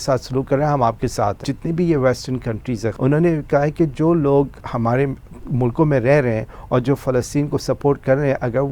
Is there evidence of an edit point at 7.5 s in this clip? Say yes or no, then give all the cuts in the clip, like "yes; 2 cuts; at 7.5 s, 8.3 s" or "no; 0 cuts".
no; 3 cuts; at 1.4 s, 3.0 s, 4.6 s